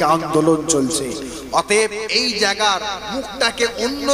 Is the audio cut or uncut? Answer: uncut